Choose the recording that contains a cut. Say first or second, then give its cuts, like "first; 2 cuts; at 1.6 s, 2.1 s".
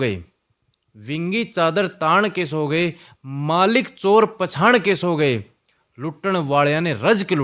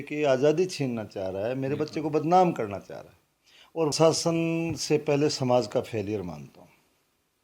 second; 1 cut; at 3.9 s